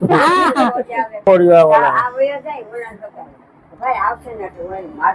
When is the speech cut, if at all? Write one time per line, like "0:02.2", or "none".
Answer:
0:01.2

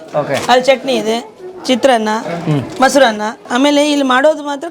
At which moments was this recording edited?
0:03.5

